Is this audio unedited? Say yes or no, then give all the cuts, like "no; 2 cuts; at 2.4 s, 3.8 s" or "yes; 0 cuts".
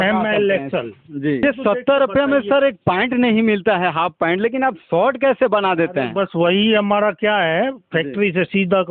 no; 1 cut; at 1.4 s